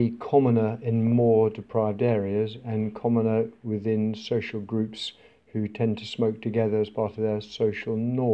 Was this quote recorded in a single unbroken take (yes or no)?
yes